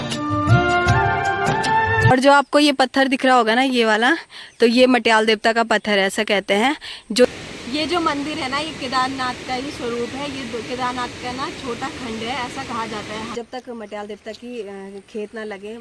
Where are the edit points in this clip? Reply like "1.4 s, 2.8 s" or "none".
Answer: 2.1 s, 7.3 s, 13.3 s